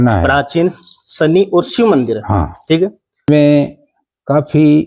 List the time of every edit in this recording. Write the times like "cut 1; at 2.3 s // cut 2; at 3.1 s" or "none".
cut 1; at 3.2 s